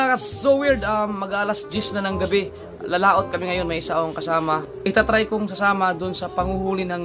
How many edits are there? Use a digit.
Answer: 0